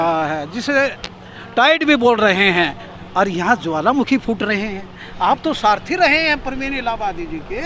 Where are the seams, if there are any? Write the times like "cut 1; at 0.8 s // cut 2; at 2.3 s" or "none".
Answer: none